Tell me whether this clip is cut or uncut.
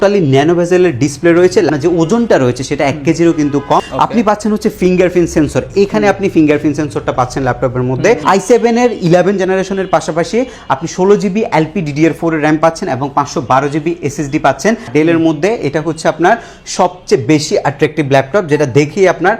cut